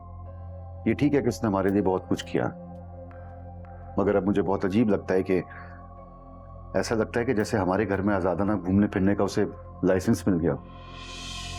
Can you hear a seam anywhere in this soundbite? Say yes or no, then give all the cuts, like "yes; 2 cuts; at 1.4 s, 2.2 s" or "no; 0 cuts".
no; 0 cuts